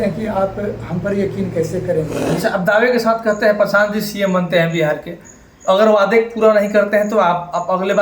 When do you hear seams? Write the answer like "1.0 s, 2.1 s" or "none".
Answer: 2.3 s